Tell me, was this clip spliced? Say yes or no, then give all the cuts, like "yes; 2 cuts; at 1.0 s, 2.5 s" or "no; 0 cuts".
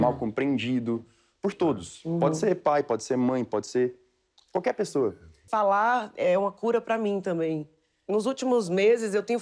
yes; 1 cut; at 5.4 s